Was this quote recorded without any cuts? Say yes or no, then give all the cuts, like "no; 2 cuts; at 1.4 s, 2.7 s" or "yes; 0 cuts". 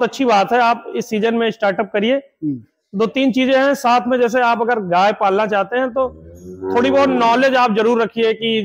yes; 0 cuts